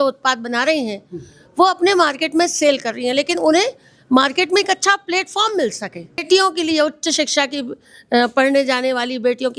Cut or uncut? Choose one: cut